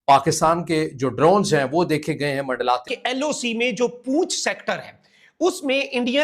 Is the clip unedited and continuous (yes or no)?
no